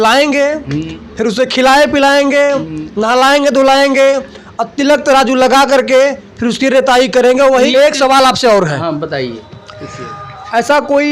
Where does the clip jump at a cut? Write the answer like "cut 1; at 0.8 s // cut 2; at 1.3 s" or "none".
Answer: cut 1; at 7.7 s